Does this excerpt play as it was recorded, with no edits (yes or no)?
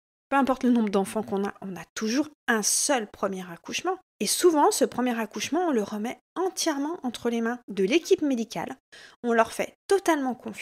no